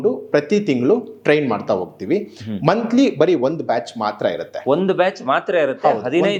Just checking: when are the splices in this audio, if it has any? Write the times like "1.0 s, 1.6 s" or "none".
none

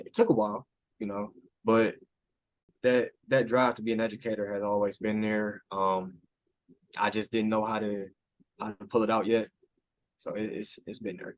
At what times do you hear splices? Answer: 2.6 s

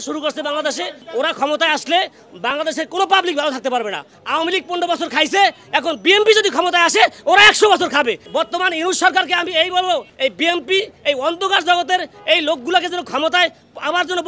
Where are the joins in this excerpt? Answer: 4.1 s, 8.2 s, 10.1 s

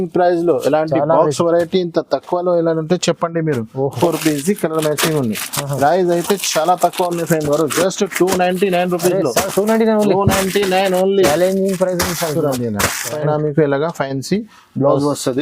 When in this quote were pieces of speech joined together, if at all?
4.0 s, 13.2 s

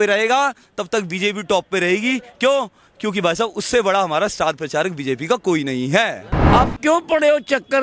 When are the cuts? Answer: 6.3 s

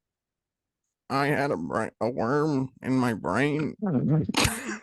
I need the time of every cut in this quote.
none

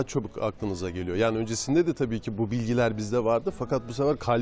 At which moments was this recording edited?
none

